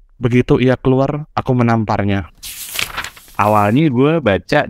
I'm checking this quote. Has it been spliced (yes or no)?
yes